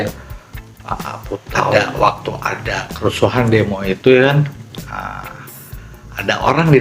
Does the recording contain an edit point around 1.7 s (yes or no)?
yes